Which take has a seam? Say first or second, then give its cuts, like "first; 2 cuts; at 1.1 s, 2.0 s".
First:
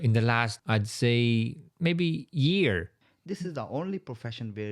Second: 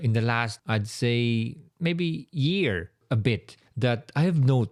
first; 1 cut; at 2.9 s